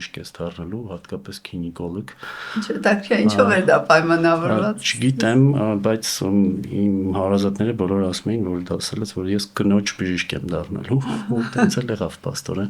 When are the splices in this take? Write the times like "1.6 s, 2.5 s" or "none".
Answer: none